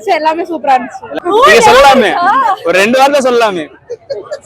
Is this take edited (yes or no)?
yes